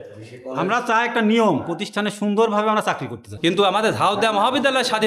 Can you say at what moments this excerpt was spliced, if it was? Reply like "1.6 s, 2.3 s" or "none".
3.2 s